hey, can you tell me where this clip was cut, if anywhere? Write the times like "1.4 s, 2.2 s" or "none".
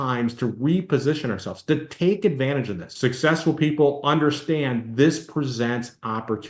2.8 s